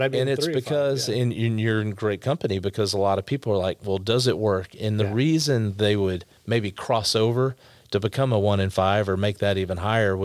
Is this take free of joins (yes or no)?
yes